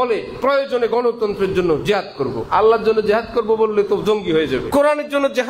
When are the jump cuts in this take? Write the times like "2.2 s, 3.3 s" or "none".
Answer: 2.4 s, 4.7 s